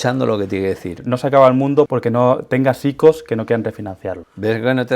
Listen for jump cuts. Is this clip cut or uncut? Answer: cut